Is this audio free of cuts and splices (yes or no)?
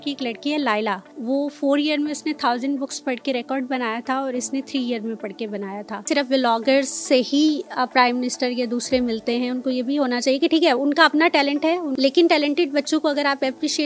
no